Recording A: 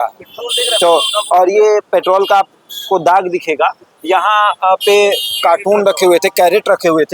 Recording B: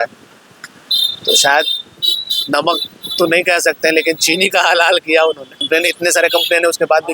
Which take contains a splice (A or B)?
B